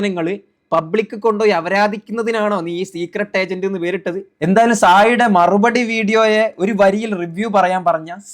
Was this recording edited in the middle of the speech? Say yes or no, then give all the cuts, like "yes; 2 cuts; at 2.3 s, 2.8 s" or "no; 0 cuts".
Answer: yes; 1 cut; at 4.3 s